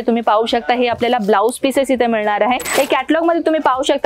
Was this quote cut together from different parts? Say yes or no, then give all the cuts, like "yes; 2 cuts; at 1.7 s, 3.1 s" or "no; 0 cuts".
yes; 1 cut; at 2.7 s